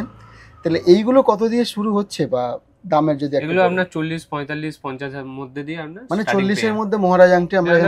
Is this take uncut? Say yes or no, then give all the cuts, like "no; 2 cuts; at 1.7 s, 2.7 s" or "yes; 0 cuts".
yes; 0 cuts